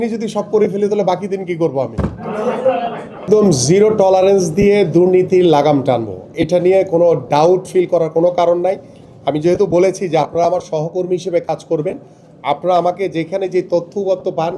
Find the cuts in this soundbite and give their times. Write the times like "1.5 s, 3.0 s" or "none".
none